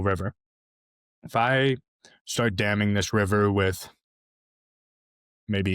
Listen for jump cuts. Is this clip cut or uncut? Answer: uncut